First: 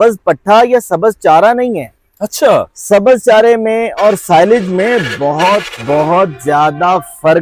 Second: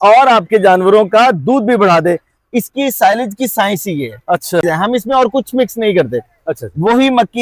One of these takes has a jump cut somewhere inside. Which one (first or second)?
second